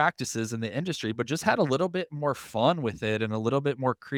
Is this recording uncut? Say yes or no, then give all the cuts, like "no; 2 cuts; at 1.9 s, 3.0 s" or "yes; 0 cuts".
yes; 0 cuts